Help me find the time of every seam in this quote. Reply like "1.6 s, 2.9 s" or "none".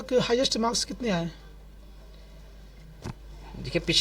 none